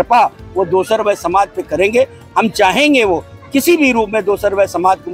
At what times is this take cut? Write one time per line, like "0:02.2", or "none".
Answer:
none